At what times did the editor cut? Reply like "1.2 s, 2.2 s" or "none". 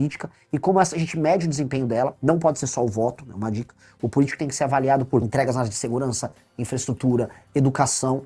5.3 s